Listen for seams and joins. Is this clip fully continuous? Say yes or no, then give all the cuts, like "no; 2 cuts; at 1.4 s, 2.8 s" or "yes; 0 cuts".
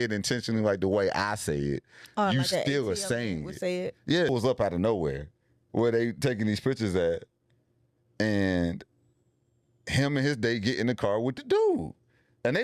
no; 1 cut; at 4.3 s